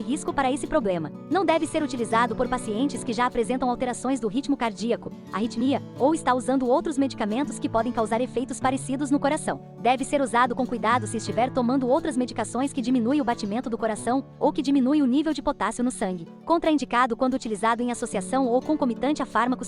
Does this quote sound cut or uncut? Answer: cut